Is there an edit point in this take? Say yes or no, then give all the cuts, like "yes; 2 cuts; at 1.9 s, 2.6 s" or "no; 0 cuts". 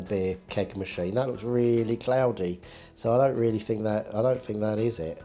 no; 0 cuts